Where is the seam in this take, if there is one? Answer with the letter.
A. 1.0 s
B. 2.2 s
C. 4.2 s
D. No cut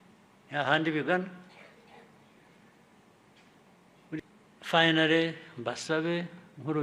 C